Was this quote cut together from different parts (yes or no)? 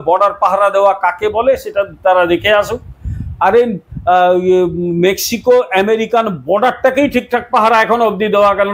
no